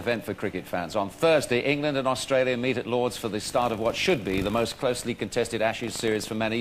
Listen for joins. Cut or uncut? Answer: cut